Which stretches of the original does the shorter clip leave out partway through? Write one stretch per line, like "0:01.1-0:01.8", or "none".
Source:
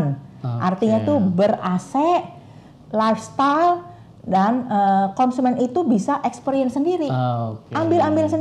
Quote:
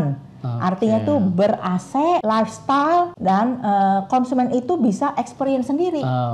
0:02.2-0:02.9
0:03.8-0:04.2